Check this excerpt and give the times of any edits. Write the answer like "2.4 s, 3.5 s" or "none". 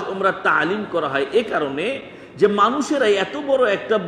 none